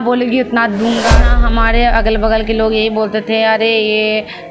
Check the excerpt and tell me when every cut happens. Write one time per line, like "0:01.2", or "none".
0:01.4